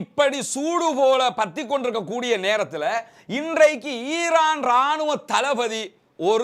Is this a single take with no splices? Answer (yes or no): yes